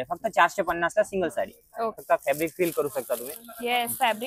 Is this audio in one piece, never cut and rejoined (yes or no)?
no